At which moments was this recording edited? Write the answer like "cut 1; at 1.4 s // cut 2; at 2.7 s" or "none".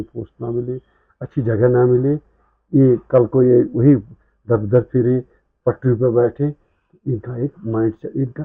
none